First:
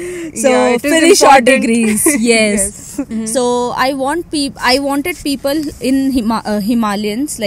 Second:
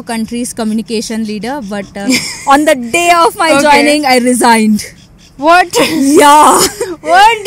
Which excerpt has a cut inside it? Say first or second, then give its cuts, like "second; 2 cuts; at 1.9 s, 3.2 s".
first; 1 cut; at 3.0 s